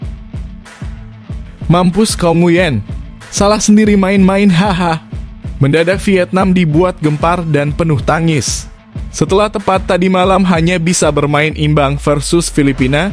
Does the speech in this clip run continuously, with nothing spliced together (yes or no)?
no